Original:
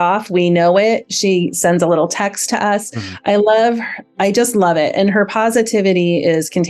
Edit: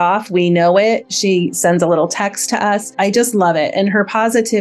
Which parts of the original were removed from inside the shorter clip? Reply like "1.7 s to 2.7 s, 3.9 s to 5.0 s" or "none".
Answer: 2.9 s to 4.1 s